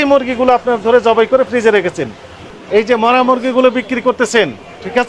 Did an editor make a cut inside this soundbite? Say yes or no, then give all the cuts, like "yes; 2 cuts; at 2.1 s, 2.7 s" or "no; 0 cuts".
yes; 1 cut; at 2.5 s